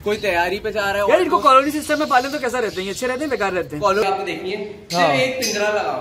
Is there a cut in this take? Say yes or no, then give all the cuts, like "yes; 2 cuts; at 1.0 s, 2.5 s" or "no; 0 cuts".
yes; 1 cut; at 4.0 s